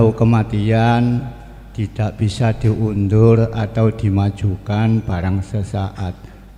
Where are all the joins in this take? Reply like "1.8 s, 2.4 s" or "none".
none